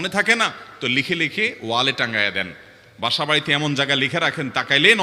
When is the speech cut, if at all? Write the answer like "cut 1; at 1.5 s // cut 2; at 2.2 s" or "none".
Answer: none